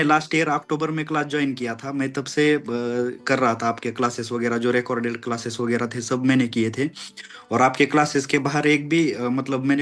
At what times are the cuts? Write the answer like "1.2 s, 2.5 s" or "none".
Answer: none